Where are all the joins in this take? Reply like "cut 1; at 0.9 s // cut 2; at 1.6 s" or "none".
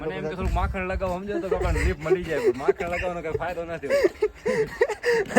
none